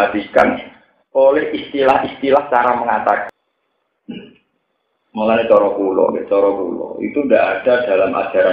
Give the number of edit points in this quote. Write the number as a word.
one